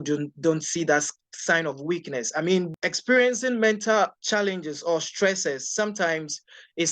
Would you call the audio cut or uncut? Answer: cut